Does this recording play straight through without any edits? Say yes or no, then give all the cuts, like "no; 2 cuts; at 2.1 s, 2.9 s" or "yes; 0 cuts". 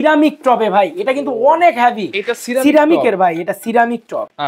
yes; 0 cuts